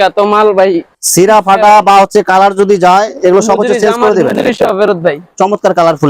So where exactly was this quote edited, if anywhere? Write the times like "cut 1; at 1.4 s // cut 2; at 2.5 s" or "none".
none